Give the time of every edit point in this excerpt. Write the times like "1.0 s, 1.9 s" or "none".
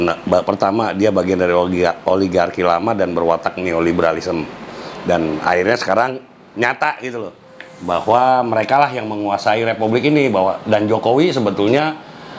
none